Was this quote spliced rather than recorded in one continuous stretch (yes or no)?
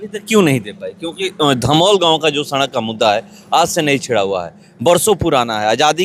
no